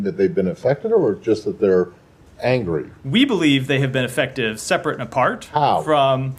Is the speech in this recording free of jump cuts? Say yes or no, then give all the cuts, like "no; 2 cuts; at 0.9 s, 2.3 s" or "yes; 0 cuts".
yes; 0 cuts